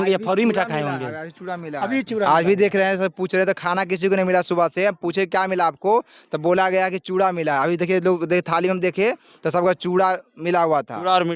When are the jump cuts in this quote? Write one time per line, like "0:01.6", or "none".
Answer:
none